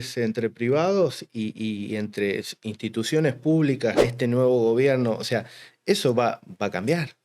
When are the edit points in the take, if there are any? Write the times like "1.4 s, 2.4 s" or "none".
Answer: 4.1 s